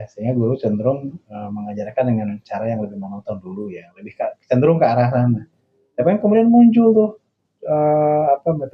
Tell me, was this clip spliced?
no; 0 cuts

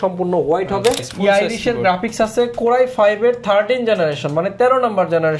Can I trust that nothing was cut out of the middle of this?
no; 1 cut; at 1.1 s

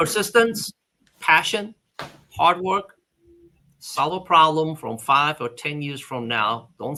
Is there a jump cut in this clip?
no; 0 cuts

